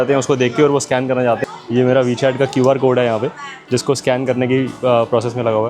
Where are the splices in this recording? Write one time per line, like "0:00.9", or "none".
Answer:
0:01.4